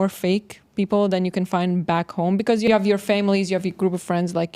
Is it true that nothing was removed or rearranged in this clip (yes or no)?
no